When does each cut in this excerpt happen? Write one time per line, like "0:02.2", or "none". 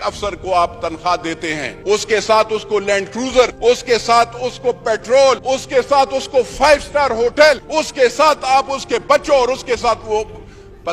0:01.7
0:03.5
0:05.4
0:07.6